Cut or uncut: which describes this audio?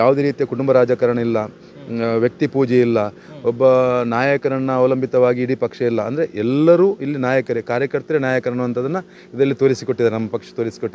uncut